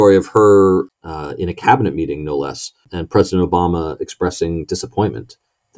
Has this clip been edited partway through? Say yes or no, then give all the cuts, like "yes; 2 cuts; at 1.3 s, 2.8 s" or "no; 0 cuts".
yes; 2 cuts; at 0.9 s, 2.9 s